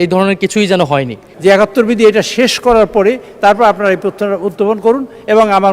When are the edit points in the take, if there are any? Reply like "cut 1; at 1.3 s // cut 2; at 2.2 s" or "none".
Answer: cut 1; at 1.2 s